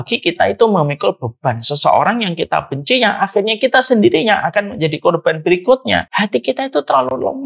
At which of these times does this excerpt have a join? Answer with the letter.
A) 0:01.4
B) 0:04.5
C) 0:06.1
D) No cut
C